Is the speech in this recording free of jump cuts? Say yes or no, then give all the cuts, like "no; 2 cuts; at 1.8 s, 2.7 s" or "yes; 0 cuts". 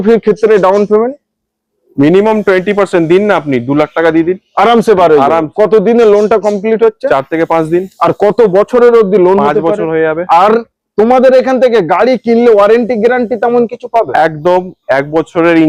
yes; 0 cuts